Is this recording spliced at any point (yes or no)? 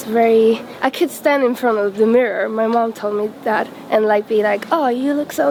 no